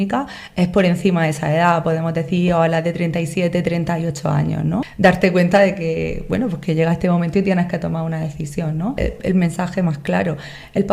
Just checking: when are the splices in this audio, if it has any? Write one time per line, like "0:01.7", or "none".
0:04.9
0:09.0